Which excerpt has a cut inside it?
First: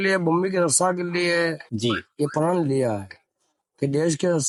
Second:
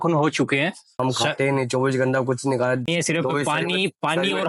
second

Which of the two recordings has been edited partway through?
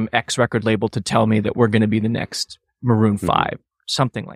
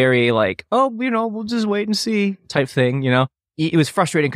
second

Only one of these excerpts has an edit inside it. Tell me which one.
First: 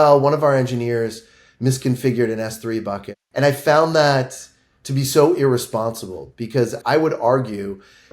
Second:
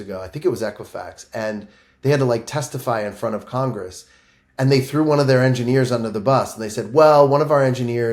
first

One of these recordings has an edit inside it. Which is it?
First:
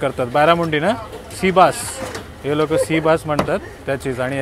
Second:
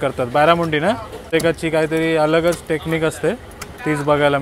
second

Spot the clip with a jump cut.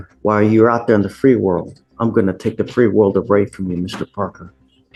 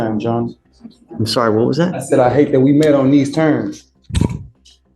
second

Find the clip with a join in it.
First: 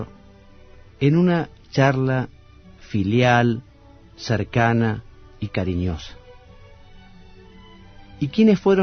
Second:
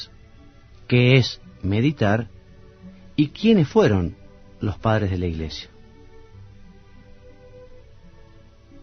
second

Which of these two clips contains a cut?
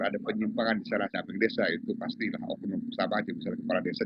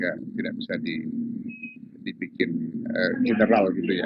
first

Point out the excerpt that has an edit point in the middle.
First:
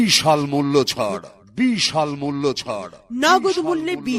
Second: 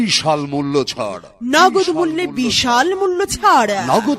second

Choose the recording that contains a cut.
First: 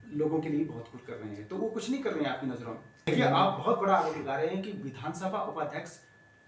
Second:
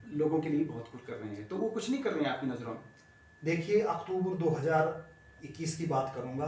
first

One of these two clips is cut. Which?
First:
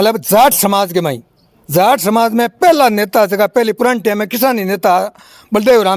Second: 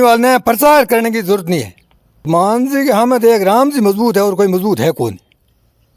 second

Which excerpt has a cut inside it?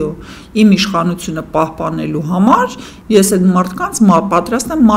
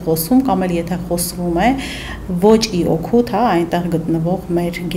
first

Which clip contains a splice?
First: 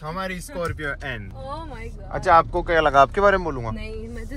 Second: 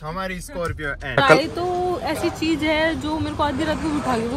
second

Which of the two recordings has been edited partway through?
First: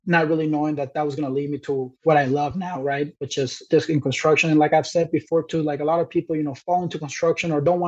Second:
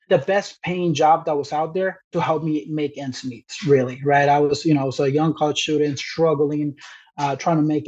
first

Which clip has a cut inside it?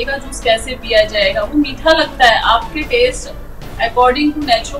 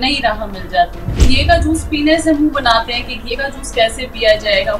second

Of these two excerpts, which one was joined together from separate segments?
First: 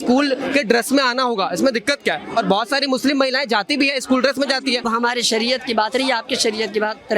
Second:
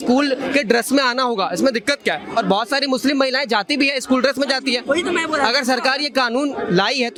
first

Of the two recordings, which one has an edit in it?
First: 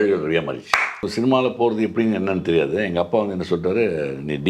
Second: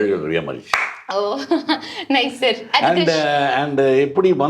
first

